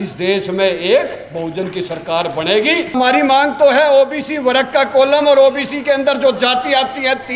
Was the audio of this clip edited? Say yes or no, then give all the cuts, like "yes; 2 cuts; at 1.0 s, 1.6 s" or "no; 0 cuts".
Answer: yes; 1 cut; at 2.9 s